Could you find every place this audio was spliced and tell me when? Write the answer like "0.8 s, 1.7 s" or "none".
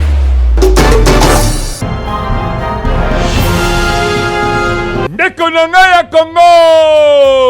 1.6 s